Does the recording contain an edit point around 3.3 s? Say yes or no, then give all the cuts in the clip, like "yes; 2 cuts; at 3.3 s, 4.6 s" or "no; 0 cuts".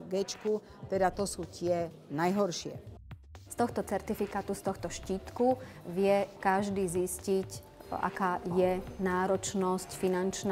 yes; 1 cut; at 3.3 s